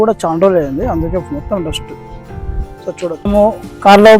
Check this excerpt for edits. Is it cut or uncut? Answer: cut